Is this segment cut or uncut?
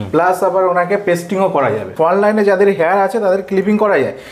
cut